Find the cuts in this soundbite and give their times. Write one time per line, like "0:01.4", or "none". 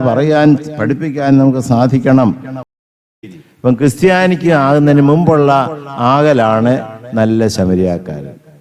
0:02.8